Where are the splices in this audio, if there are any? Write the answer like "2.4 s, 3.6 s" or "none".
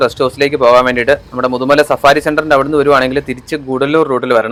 none